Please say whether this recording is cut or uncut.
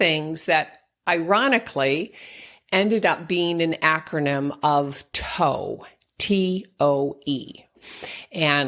uncut